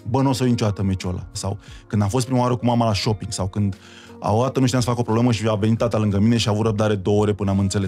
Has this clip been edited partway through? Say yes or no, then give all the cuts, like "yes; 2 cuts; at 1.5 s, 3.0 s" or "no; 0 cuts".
yes; 1 cut; at 1.3 s